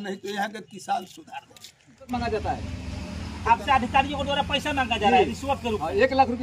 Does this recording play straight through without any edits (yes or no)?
no